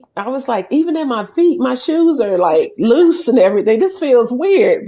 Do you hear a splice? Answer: no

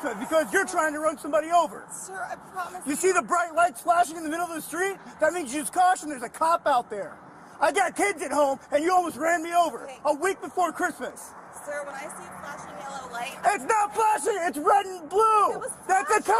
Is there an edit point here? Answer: no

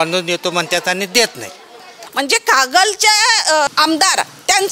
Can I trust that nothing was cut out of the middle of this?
no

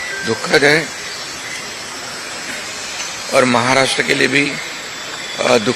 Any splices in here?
no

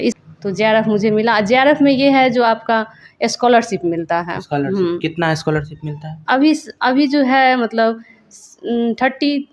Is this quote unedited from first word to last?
yes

